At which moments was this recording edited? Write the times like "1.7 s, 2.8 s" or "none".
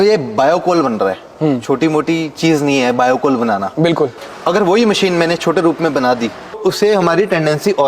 4.2 s, 6.5 s